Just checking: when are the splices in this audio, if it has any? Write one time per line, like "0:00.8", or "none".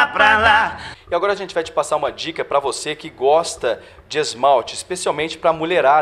0:00.9